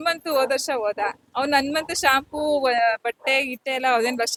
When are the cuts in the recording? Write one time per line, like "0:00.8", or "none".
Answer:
none